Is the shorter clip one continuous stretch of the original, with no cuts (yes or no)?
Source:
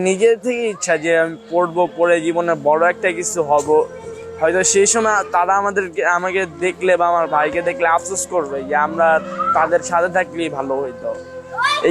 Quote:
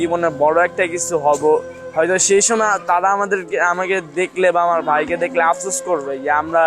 no